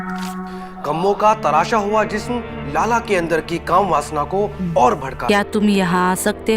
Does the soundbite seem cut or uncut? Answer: cut